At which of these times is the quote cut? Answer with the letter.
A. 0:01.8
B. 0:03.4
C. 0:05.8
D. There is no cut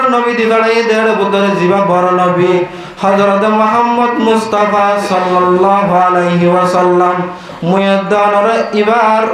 D